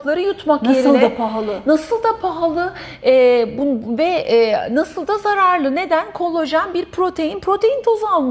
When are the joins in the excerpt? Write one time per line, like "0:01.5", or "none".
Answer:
none